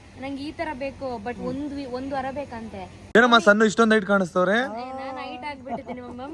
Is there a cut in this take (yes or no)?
yes